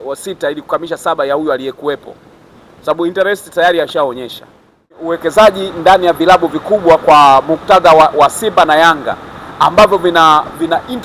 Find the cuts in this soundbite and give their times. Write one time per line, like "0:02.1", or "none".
0:05.2